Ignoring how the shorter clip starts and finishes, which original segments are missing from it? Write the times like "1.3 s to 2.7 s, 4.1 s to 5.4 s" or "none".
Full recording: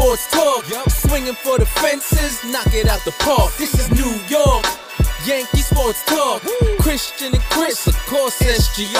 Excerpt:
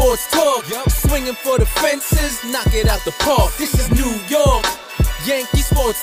none